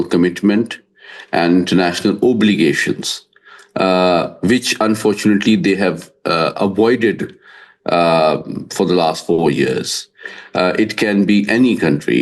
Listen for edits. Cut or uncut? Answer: uncut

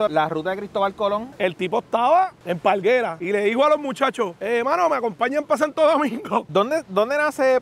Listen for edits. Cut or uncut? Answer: cut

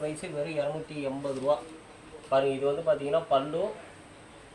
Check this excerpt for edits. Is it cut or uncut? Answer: uncut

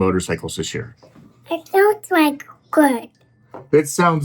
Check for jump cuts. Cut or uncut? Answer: uncut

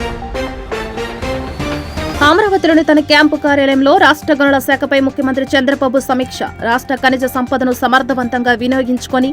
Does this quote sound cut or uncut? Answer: cut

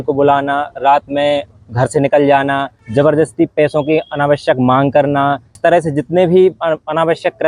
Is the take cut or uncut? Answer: cut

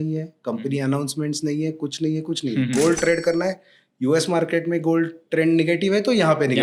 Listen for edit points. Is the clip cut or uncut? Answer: uncut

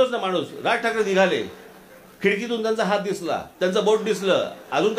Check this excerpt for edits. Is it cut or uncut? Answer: uncut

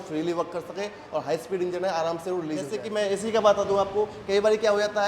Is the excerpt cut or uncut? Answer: cut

